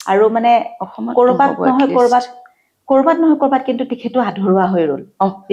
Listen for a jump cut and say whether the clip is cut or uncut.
uncut